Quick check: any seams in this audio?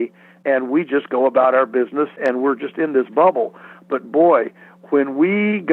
yes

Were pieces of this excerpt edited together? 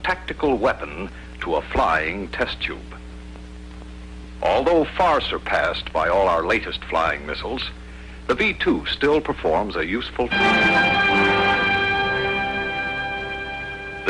no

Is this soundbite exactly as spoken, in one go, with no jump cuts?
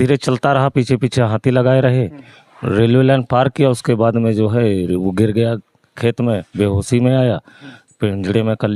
yes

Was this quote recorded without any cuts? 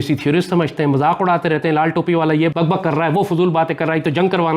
no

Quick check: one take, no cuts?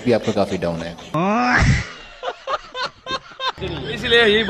no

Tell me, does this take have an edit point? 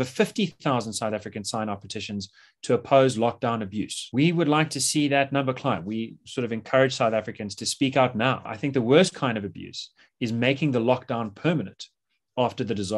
no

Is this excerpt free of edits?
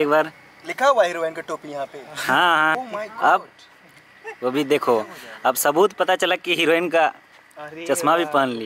no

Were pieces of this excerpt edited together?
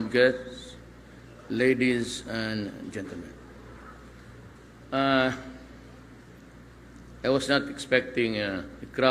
no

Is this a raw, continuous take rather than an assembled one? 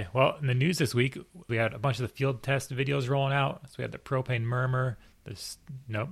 no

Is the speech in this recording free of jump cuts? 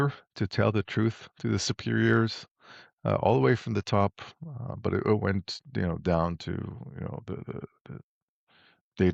yes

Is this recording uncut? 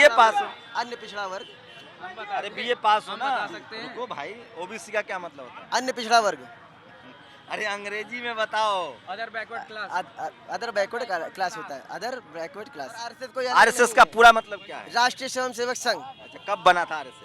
no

